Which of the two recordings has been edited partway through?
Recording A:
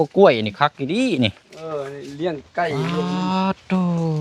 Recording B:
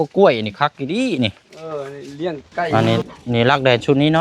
B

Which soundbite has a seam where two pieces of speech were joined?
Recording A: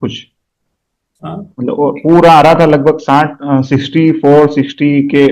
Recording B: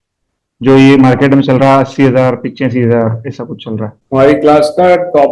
B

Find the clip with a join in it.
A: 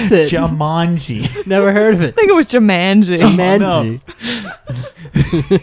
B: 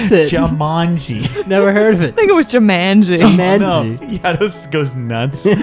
B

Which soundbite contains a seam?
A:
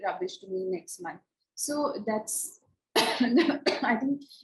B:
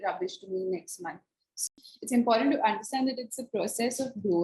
B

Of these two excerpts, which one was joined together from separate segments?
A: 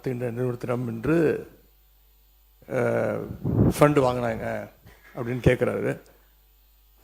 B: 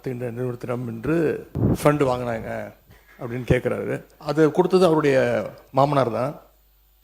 B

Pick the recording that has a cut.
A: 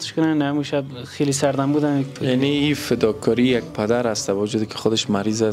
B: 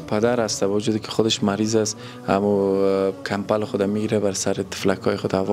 A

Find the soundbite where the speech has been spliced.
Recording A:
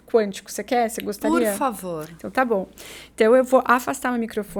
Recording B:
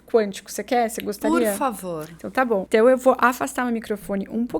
B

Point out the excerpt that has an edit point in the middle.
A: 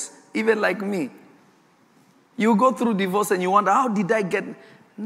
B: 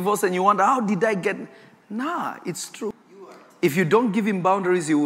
B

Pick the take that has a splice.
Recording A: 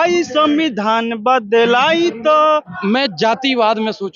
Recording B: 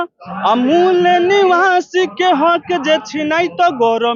A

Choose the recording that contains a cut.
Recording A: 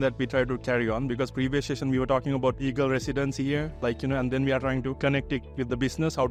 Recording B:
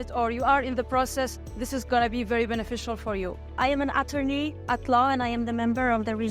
B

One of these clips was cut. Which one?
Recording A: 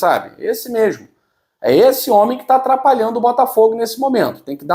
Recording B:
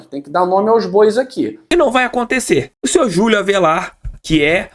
B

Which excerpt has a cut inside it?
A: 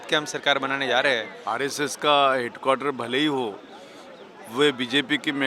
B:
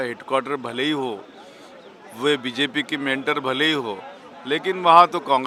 A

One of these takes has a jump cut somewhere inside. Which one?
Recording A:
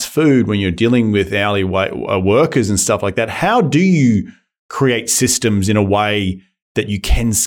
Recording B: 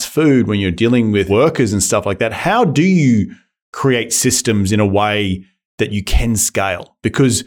B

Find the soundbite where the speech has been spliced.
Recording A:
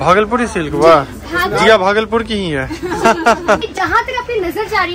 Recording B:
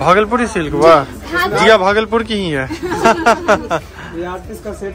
A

